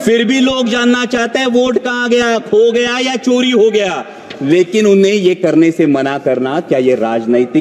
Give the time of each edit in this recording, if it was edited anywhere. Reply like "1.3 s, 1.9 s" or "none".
none